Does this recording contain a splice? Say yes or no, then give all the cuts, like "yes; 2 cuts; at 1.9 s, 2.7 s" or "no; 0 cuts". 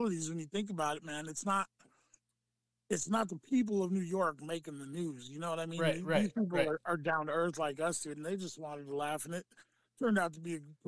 no; 0 cuts